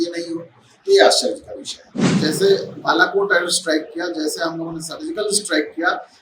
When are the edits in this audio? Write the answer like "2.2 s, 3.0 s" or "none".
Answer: 2.1 s